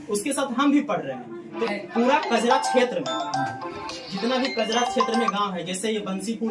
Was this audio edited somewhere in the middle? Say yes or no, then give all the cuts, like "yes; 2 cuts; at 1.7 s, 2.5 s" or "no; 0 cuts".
yes; 1 cut; at 1.5 s